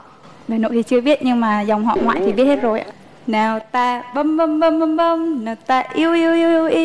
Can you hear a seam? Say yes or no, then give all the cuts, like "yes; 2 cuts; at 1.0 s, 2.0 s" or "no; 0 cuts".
yes; 1 cut; at 2.9 s